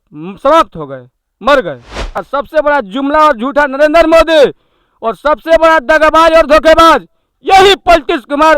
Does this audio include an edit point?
yes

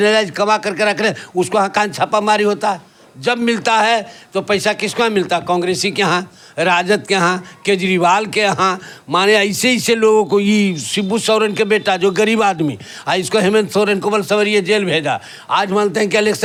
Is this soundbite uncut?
yes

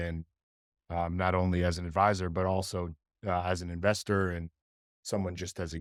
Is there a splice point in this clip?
no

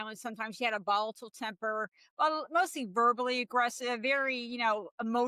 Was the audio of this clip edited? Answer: no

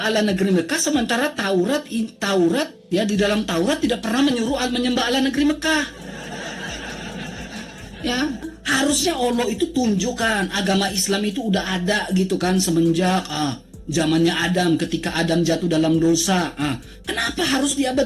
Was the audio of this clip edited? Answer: yes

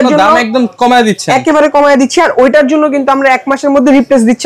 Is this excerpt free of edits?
yes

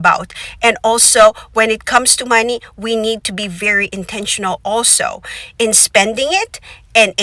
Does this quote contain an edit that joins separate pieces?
no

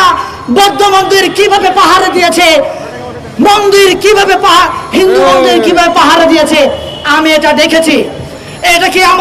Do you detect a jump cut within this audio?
no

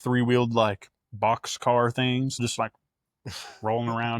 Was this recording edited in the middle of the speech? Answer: yes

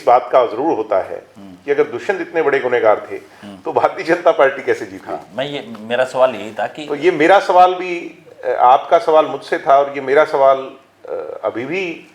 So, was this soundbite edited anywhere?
no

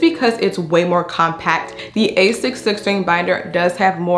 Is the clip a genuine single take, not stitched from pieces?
no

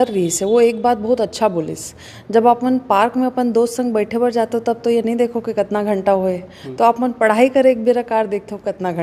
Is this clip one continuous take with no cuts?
yes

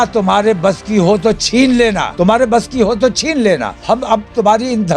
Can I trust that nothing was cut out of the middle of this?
no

